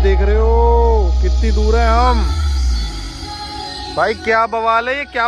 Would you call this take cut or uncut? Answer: uncut